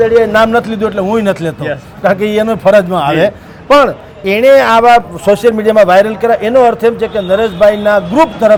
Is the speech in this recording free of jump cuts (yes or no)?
yes